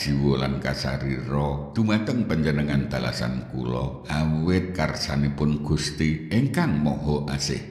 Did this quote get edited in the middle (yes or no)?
yes